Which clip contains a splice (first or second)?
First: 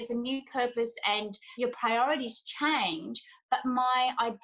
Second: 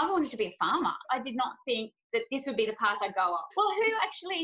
second